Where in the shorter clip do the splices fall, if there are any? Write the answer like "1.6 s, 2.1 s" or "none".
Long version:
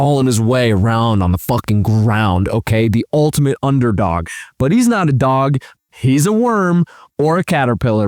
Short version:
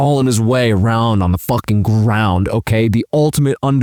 none